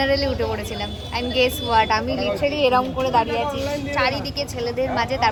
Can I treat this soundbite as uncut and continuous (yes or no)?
yes